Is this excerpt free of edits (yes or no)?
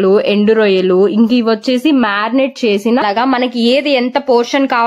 no